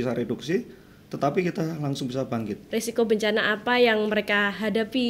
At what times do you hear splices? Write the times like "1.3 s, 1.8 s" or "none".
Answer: 2.6 s